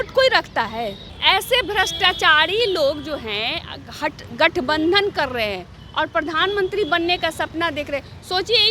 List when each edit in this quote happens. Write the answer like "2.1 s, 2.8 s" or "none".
1.1 s

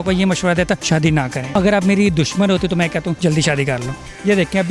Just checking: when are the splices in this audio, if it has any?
0.9 s, 3.2 s

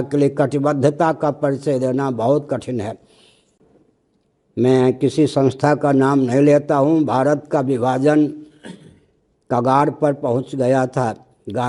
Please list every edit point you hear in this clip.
none

